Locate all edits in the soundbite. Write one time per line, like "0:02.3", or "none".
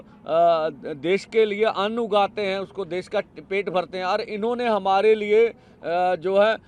none